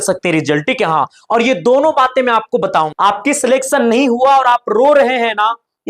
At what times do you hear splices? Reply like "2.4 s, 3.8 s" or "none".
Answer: 2.9 s